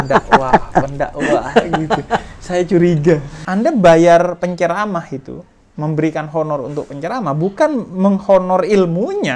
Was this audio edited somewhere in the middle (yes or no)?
yes